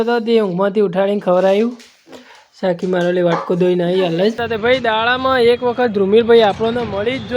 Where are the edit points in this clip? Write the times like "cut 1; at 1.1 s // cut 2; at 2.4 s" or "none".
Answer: cut 1; at 4.4 s